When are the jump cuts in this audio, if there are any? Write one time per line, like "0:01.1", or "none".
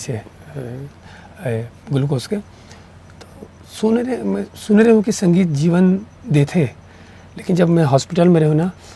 none